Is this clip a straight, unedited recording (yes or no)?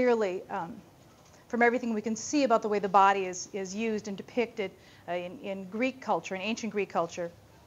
no